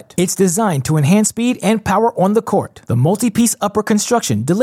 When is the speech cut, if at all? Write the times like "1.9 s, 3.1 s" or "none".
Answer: none